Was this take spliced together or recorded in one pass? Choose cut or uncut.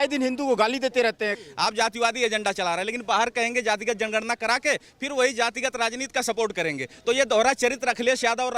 cut